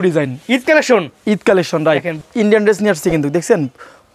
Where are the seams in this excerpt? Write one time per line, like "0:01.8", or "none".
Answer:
0:02.1